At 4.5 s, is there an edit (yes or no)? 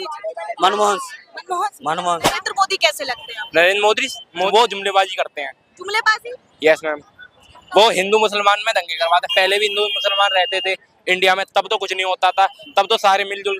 yes